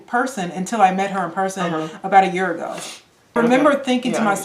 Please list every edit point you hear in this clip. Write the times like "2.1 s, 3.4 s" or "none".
3.4 s